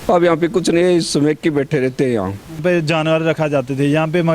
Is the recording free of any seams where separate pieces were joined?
no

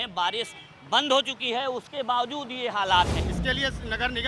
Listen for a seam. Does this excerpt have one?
yes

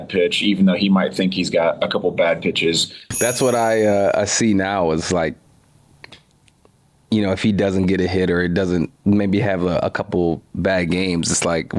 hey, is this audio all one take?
no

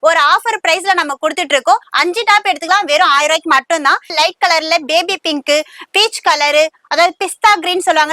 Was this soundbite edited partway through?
yes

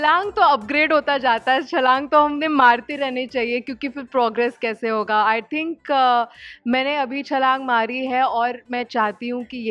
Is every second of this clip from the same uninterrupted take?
yes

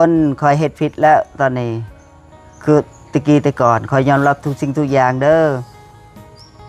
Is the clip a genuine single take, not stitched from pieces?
yes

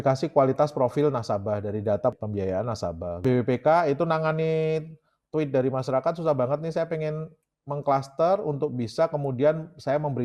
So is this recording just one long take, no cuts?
yes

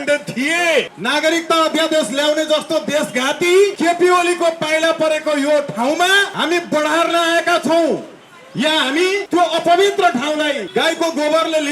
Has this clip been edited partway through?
yes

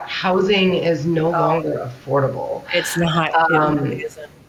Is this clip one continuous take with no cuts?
yes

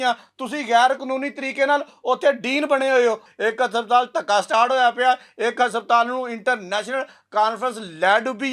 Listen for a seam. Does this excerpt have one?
yes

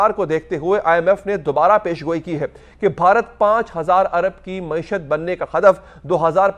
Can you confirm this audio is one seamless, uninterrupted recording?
yes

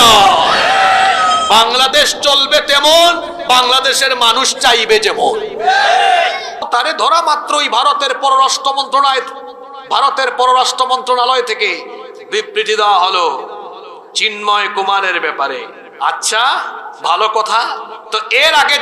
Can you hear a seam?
yes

